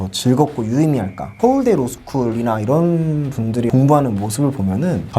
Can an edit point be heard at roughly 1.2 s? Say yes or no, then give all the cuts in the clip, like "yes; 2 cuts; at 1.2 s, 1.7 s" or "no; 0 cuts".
yes; 1 cut; at 1.2 s